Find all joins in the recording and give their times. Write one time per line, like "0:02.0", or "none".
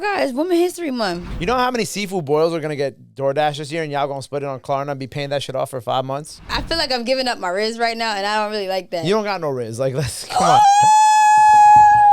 0:01.3
0:06.5